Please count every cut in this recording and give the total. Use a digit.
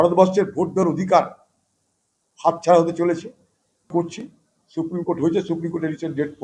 1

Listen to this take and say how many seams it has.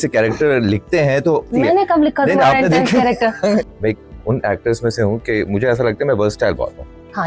2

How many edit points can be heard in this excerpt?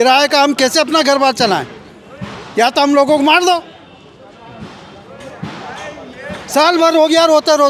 0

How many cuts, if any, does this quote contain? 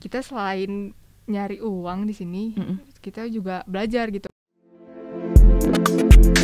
1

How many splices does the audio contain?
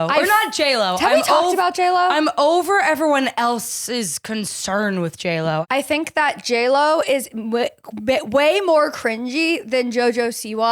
1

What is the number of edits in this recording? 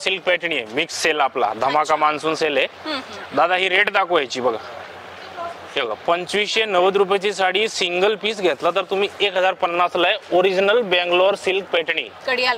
0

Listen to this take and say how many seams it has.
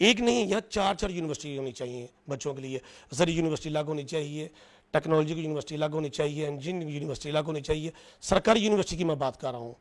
0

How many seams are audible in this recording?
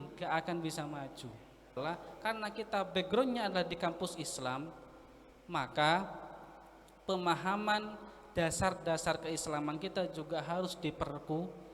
1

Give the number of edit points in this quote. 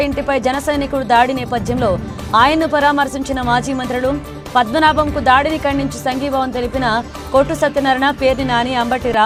0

